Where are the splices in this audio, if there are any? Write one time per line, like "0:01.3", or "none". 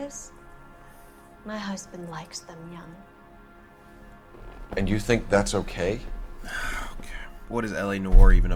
none